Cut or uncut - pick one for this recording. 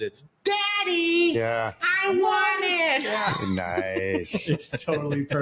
uncut